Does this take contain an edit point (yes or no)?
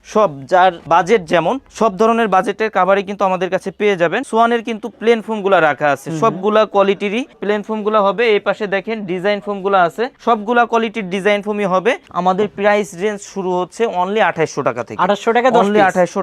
yes